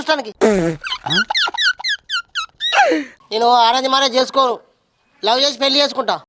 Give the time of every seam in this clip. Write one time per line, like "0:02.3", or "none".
0:03.1